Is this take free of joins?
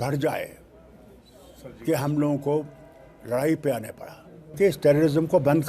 no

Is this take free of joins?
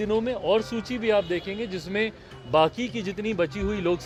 yes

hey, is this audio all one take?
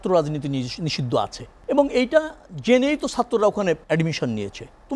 no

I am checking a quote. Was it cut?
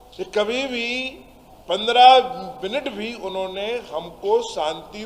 no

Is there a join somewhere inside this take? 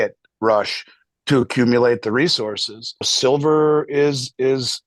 yes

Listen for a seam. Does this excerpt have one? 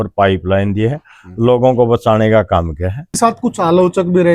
yes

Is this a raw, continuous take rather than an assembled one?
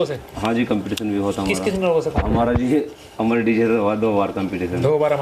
yes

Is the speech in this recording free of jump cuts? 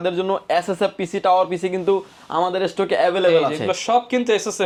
yes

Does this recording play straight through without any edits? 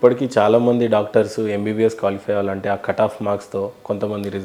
yes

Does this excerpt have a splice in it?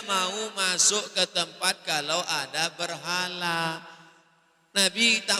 no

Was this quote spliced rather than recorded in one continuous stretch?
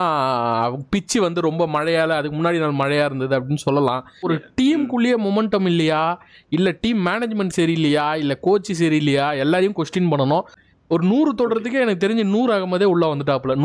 yes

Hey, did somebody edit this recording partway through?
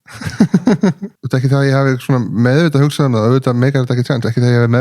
yes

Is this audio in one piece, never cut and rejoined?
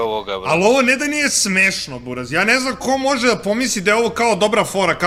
yes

